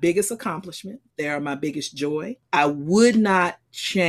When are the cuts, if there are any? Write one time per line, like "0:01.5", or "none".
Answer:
0:01.0
0:02.4